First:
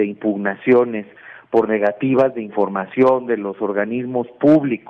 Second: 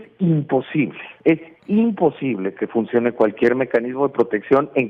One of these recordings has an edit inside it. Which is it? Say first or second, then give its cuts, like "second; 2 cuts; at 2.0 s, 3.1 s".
second; 1 cut; at 1.0 s